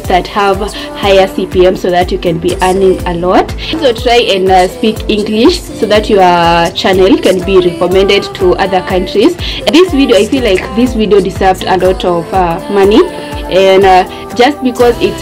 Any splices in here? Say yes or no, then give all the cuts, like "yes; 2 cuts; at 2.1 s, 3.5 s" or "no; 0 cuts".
no; 0 cuts